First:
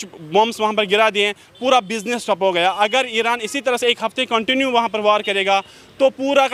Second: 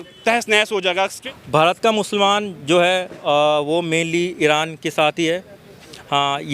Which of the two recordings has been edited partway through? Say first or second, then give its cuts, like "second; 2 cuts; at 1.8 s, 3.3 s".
second; 1 cut; at 1.2 s